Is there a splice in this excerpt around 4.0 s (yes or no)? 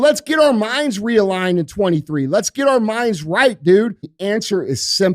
yes